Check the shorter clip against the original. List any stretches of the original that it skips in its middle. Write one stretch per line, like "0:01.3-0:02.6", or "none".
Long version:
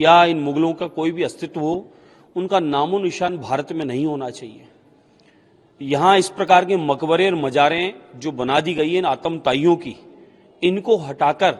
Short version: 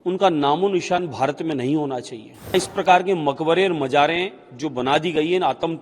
0:04.8-0:06.2